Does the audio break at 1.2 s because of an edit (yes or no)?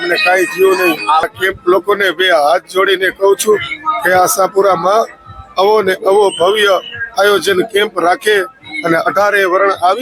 yes